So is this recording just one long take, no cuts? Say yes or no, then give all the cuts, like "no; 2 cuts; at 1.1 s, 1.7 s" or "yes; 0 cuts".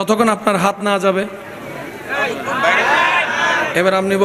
yes; 0 cuts